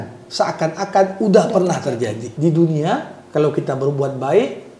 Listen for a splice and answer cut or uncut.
cut